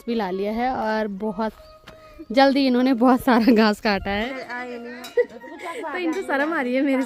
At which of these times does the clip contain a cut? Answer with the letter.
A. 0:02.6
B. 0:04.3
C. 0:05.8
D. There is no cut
B